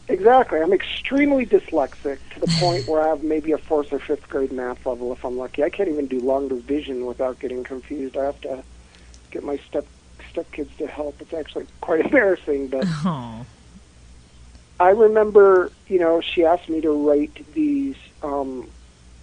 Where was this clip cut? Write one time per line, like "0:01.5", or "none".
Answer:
0:15.0